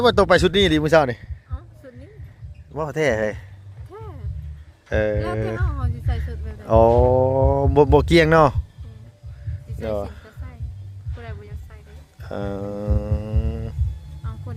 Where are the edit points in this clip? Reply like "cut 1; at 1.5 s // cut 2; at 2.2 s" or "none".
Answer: none